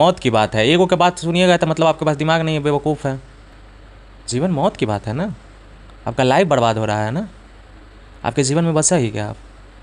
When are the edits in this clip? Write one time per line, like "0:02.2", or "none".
none